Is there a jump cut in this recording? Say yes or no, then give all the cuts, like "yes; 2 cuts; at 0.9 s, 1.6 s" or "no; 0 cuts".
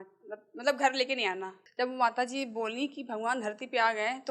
yes; 1 cut; at 1.6 s